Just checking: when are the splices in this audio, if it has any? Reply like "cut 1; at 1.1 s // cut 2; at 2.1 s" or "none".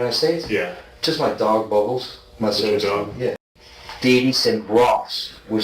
cut 1; at 3.4 s